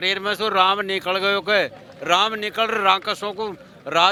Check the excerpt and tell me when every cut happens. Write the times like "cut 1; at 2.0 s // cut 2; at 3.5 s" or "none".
none